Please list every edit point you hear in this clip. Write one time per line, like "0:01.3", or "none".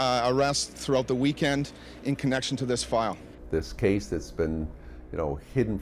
0:03.2